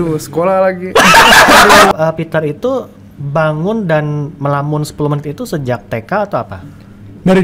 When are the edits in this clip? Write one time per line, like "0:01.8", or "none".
0:01.9